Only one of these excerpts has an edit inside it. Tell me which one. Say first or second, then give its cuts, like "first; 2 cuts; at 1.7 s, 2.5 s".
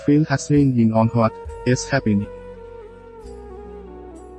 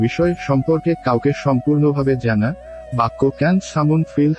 first; 1 cut; at 2.3 s